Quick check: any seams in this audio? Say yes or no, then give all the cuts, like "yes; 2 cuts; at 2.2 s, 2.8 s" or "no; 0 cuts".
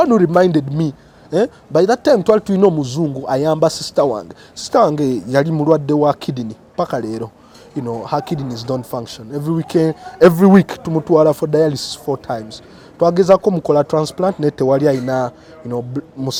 no; 0 cuts